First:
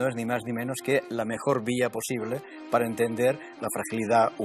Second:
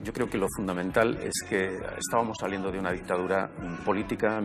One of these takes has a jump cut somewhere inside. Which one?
first; 1 cut; at 3.5 s

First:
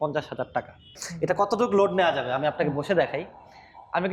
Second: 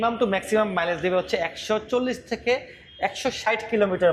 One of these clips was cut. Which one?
first; 1 cut; at 1.1 s

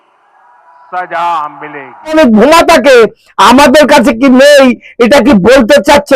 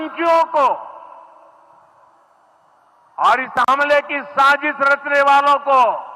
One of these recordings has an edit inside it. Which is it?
first; 1 cut; at 2.1 s

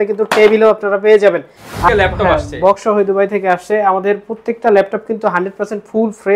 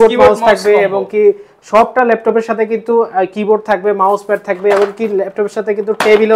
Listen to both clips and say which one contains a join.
first; 1 cut; at 1.9 s

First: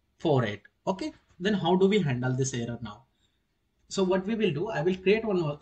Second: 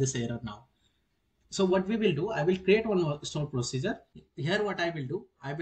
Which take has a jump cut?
second; 1 cut; at 4.2 s

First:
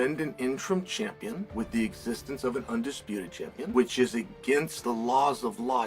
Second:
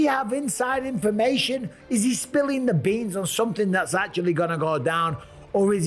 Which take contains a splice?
first; 3 cuts; at 1.4 s, 3.7 s, 4.7 s

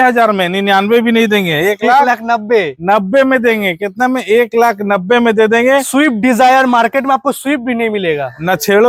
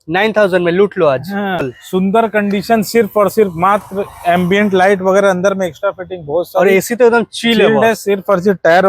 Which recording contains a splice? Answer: second; 1 cut; at 1.8 s

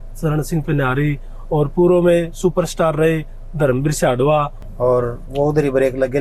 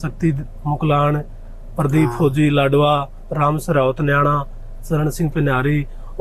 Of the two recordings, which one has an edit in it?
first; 1 cut; at 4.6 s

